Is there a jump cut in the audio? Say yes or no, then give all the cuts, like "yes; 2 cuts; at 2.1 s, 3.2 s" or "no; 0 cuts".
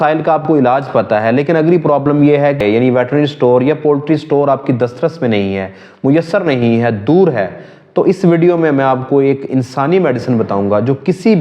yes; 1 cut; at 2.6 s